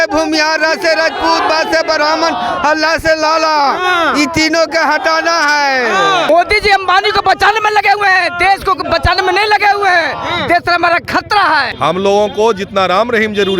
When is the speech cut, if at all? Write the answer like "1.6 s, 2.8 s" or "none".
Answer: 6.3 s, 11.7 s